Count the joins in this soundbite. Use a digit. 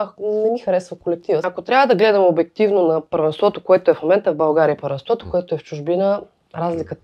1